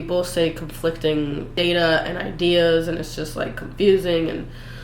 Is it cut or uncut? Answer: cut